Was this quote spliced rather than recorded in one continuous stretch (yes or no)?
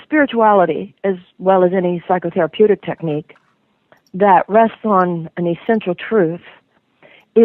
yes